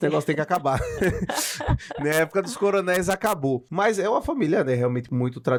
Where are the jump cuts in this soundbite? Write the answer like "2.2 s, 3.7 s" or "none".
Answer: none